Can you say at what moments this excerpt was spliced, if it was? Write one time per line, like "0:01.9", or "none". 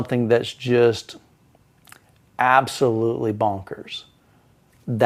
none